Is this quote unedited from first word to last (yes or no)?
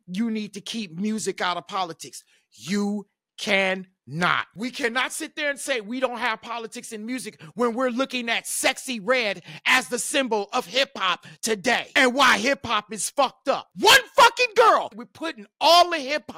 no